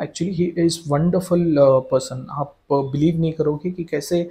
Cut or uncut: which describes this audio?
uncut